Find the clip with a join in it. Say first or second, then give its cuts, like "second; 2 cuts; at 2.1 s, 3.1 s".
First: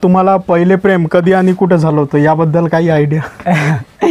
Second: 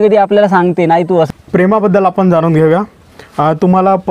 second; 1 cut; at 1.3 s